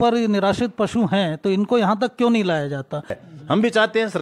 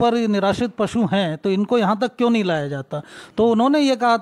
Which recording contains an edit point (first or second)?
first